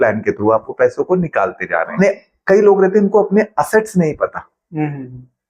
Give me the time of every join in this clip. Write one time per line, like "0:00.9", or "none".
0:01.9